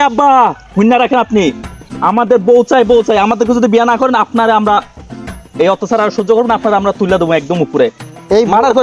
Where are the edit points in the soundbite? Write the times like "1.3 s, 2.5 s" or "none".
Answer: none